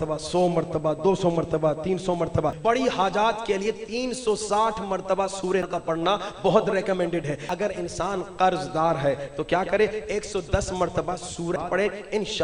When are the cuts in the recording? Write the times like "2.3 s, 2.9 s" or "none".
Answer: 2.6 s, 5.7 s, 7.4 s, 11.6 s